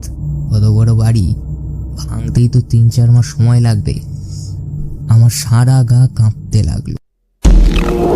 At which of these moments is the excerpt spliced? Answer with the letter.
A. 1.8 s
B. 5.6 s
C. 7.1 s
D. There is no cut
C